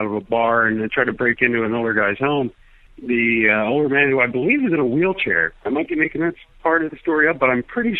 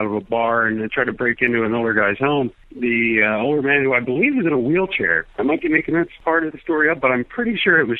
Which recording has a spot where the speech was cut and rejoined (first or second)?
second